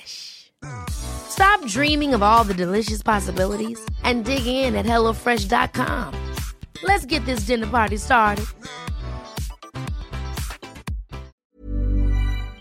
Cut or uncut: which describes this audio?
cut